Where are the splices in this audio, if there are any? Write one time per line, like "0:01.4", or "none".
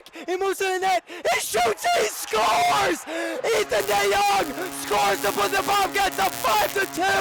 none